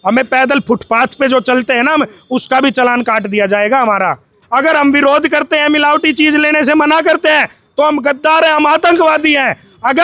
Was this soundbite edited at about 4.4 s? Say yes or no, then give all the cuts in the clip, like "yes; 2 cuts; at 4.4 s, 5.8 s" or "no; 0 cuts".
yes; 1 cut; at 4.4 s